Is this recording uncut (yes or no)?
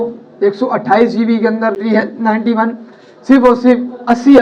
no